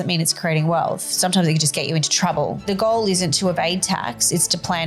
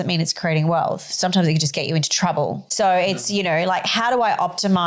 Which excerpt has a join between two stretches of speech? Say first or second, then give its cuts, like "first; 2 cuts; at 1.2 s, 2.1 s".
first; 1 cut; at 2.6 s